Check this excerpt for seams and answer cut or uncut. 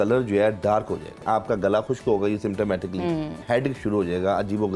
cut